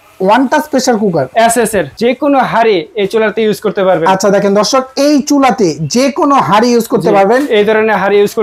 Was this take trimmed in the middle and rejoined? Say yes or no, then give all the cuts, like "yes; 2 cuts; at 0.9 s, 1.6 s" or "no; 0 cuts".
yes; 1 cut; at 1.9 s